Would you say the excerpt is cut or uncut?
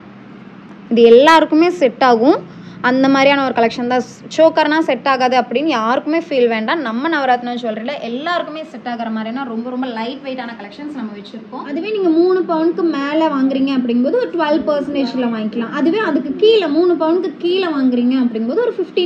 cut